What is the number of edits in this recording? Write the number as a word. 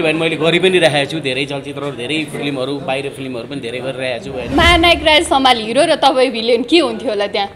one